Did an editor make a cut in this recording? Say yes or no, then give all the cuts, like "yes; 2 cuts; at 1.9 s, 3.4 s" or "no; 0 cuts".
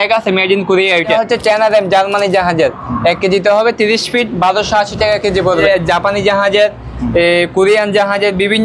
yes; 2 cuts; at 1.1 s, 5.6 s